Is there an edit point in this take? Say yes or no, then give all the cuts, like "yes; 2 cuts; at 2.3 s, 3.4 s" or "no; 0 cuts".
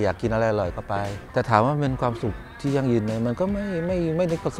yes; 1 cut; at 1.2 s